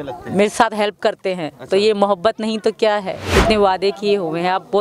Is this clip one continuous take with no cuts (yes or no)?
no